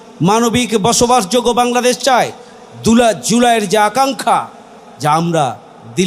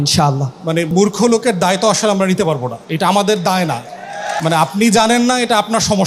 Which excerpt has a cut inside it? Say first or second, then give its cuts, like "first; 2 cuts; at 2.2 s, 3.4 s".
second; 3 cuts; at 0.9 s, 2.8 s, 4.3 s